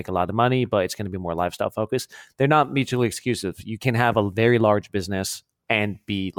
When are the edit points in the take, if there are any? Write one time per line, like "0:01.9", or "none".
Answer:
0:05.5